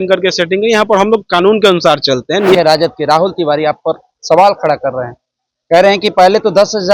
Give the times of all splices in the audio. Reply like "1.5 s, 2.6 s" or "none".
2.6 s